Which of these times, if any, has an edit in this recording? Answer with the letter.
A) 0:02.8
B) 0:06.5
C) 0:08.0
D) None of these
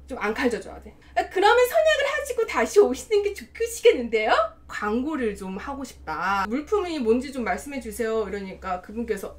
B